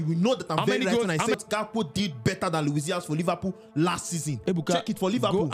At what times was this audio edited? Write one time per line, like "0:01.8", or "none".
0:01.4
0:04.3